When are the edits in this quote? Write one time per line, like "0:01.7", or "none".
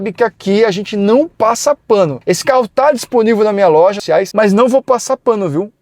0:02.2
0:04.1